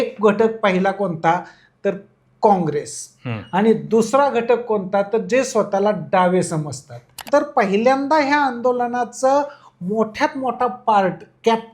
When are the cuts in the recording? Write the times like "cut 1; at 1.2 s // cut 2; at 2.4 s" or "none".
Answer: cut 1; at 7.2 s

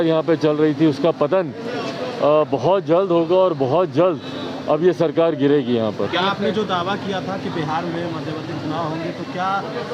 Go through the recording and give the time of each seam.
none

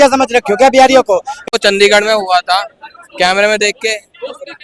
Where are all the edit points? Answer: cut 1; at 1.6 s

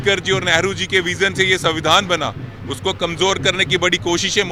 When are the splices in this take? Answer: none

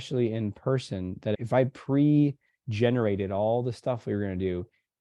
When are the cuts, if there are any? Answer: cut 1; at 1.4 s

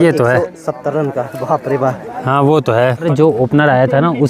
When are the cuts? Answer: cut 1; at 3.0 s

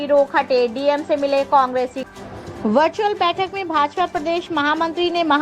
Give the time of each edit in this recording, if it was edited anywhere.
cut 1; at 2.0 s

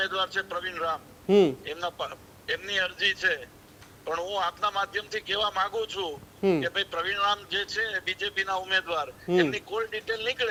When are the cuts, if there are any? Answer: none

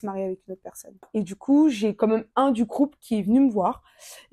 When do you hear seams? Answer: cut 1; at 1.1 s

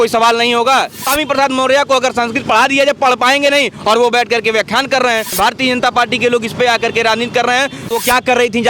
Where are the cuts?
cut 1; at 1.0 s // cut 2; at 5.4 s // cut 3; at 7.9 s

